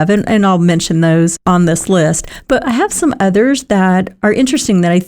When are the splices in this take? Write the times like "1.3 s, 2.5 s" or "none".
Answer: 1.4 s, 4.1 s